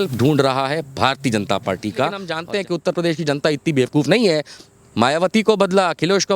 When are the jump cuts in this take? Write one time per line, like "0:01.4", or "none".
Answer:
0:02.3